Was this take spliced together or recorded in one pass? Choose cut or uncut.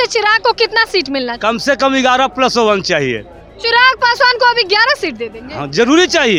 uncut